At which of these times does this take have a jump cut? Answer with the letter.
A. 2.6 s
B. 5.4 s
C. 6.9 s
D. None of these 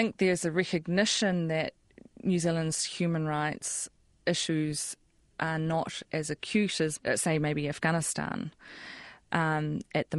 C